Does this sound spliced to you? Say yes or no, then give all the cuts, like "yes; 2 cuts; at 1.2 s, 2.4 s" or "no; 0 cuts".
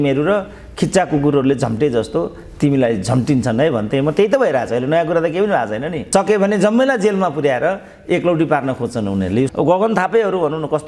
yes; 2 cuts; at 5.9 s, 9.5 s